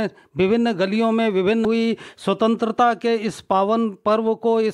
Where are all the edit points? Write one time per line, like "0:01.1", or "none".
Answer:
0:01.6